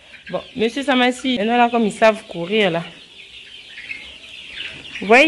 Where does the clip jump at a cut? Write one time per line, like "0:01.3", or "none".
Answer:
0:01.4